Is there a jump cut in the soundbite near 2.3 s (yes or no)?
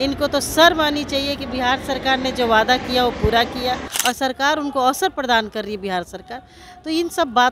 no